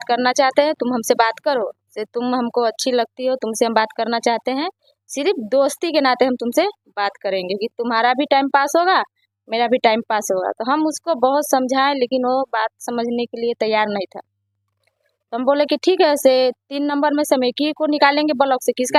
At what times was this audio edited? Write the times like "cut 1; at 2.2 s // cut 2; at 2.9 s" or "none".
none